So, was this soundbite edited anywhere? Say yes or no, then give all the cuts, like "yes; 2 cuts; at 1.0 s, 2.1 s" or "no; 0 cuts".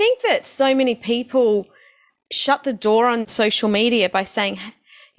yes; 1 cut; at 3.3 s